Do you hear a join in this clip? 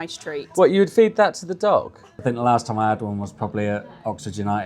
yes; 1 cut; at 2.1 s

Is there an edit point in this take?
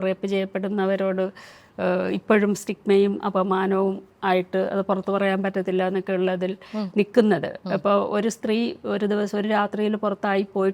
no; 0 cuts

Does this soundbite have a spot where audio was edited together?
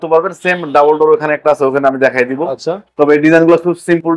no; 0 cuts

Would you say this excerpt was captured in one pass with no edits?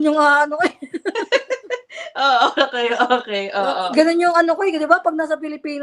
yes; 0 cuts

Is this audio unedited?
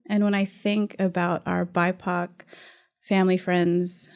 yes; 0 cuts

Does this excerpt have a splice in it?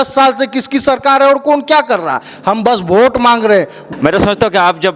yes; 1 cut; at 3.8 s

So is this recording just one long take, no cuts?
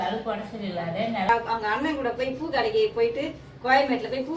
no; 1 cut; at 1.3 s

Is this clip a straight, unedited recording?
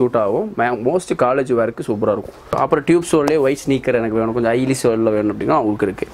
no; 1 cut; at 2.6 s

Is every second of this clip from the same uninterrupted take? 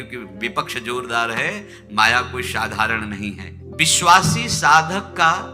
no; 1 cut; at 3.6 s

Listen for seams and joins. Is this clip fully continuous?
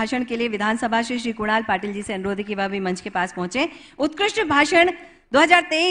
yes; 0 cuts

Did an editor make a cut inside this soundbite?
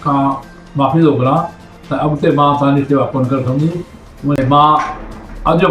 yes; 1 cut; at 4.4 s

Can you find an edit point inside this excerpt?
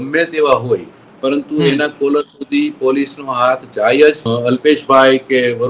yes; 1 cut; at 4.2 s

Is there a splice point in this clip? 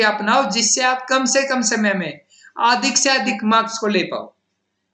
no; 0 cuts

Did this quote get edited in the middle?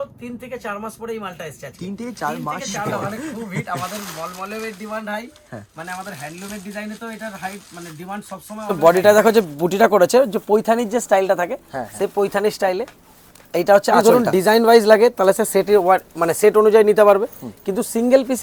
yes; 3 cuts; at 3.0 s, 8.7 s, 14.0 s

